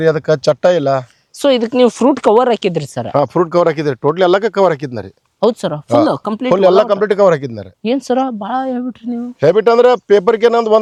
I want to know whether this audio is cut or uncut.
uncut